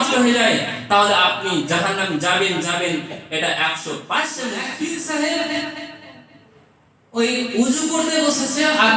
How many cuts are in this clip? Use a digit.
1